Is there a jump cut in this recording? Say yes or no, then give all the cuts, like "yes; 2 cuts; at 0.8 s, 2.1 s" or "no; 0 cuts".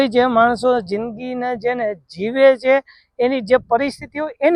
no; 0 cuts